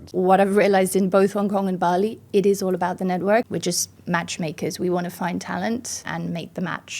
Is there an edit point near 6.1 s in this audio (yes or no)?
yes